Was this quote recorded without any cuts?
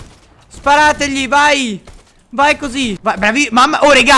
no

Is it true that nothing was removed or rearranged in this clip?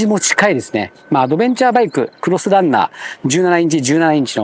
yes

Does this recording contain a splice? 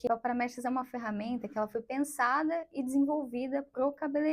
no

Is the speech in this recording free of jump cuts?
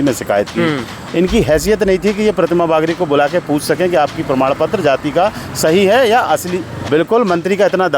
no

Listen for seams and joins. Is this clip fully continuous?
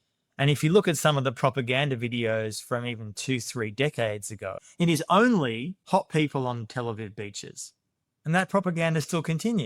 no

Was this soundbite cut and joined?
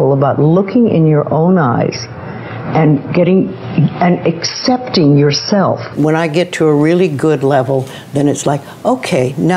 yes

